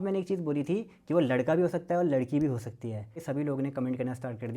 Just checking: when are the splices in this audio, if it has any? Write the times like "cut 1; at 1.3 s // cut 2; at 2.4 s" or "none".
cut 1; at 3.2 s